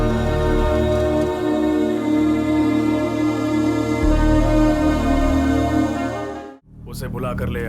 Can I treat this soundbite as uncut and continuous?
no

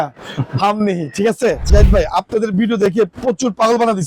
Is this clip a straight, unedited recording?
no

